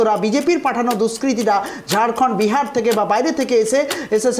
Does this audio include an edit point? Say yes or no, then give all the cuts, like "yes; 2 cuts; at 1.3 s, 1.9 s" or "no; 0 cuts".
no; 0 cuts